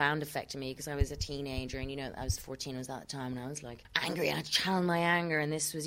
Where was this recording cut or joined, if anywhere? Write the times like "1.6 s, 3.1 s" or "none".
3.8 s